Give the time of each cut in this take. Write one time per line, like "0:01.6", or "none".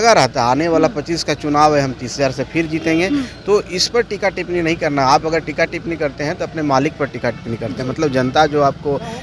none